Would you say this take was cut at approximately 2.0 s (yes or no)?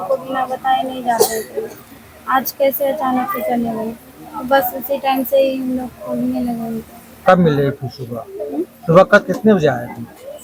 no